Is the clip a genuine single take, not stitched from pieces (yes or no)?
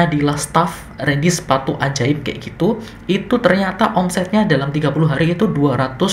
yes